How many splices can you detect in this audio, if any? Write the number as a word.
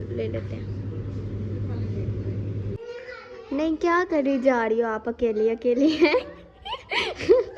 one